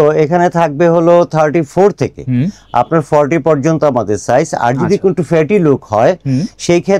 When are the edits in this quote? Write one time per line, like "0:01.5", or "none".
none